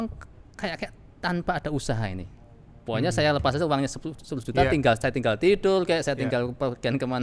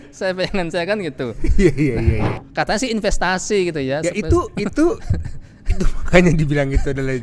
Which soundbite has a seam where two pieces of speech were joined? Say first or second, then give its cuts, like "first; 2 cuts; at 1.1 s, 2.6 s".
second; 1 cut; at 2.3 s